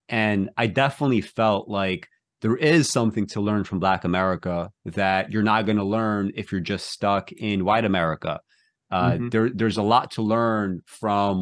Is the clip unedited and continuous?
yes; 0 cuts

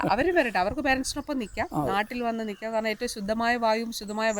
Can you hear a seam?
no; 0 cuts

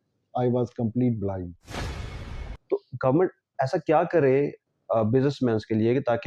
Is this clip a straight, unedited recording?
no; 1 cut; at 2.1 s

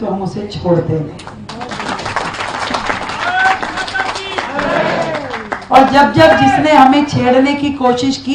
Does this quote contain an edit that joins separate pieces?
no; 0 cuts

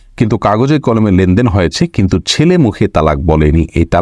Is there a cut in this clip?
no; 0 cuts

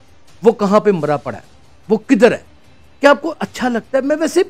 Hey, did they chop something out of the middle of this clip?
no; 0 cuts

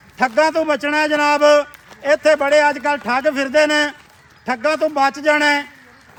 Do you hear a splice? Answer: no; 0 cuts

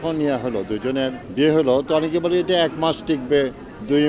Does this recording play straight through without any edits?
no; 1 cut; at 1.2 s

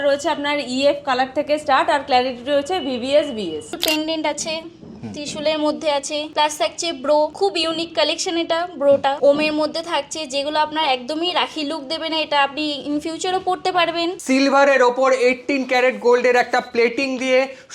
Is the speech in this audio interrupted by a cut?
yes; 5 cuts; at 3.8 s, 6.3 s, 7.3 s, 9.2 s, 14.2 s

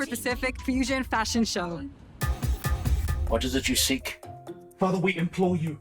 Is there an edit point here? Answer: yes; 1 cut; at 3.1 s

